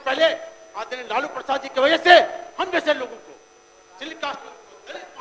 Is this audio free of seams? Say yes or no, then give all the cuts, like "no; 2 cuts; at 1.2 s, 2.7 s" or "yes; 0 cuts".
yes; 0 cuts